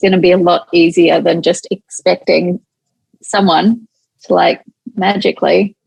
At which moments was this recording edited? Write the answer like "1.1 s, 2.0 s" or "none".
none